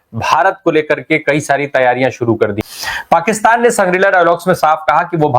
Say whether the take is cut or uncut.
cut